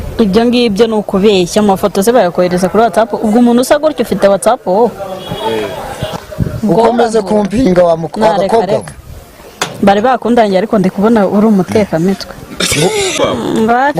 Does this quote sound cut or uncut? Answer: cut